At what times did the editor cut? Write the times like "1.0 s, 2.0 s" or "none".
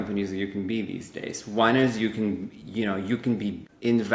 none